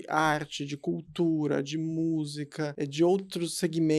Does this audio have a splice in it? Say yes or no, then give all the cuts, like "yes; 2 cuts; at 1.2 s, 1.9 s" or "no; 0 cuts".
yes; 1 cut; at 2.7 s